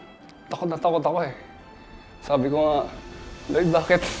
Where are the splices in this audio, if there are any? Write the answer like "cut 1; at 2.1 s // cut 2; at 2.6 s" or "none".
none